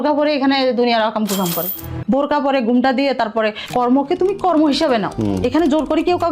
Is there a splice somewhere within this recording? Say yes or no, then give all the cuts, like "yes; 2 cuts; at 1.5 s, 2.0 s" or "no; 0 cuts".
yes; 3 cuts; at 1.7 s, 3.6 s, 5.1 s